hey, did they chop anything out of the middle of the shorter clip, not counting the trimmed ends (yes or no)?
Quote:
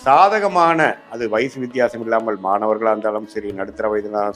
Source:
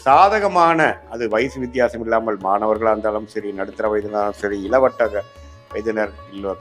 no